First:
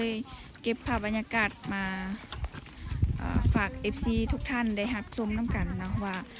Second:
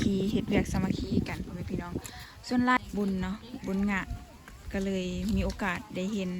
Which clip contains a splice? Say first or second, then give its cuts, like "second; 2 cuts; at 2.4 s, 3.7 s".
second; 1 cut; at 2.8 s